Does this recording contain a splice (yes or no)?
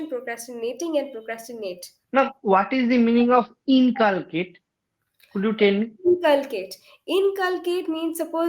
yes